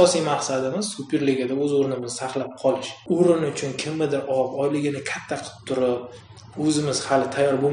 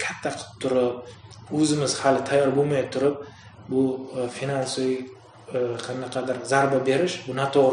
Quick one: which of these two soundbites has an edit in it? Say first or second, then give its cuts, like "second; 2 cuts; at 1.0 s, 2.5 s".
first; 1 cut; at 3.0 s